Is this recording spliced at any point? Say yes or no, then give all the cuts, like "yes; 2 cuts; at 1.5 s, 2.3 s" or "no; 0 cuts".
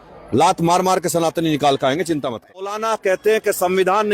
yes; 1 cut; at 2.7 s